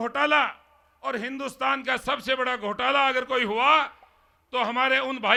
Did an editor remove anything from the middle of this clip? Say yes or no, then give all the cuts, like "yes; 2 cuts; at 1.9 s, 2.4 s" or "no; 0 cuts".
no; 0 cuts